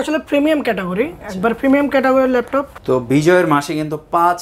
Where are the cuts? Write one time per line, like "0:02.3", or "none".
0:02.7